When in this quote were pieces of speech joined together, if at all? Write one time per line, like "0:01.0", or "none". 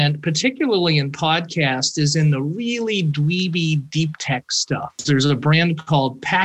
0:05.0